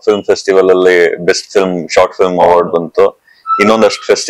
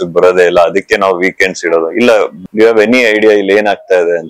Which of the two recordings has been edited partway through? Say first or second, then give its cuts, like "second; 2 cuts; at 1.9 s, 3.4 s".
second; 1 cut; at 2.3 s